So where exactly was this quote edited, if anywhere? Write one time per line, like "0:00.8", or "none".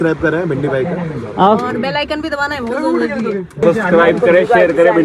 0:03.6